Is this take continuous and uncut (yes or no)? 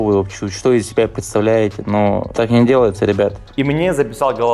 no